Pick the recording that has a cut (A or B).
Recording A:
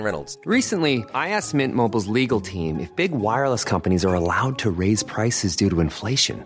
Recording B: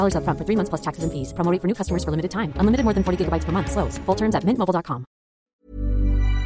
B